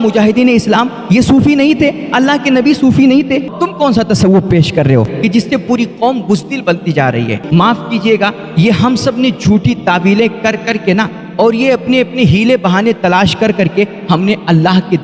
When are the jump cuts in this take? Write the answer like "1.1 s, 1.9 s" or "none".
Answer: 3.5 s, 7.4 s